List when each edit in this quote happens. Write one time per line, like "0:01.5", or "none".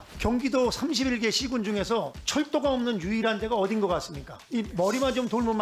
none

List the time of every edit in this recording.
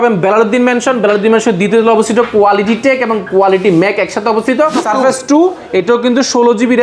0:04.8

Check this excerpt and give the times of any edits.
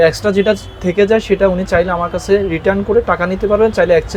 none

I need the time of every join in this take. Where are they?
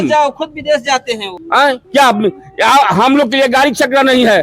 0:01.6

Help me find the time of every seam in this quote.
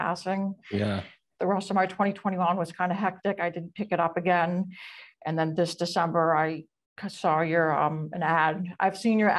0:01.2

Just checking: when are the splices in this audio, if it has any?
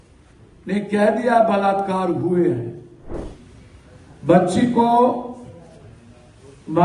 0:03.2

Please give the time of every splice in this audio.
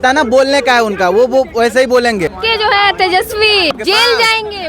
0:02.4
0:03.7

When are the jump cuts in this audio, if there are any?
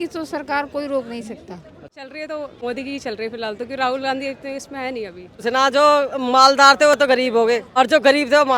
0:02.3
0:05.4
0:07.7

